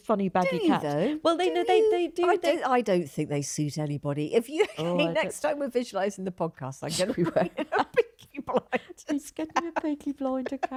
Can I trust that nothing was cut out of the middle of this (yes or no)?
yes